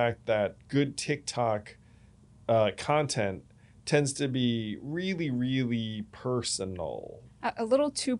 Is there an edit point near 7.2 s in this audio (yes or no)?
yes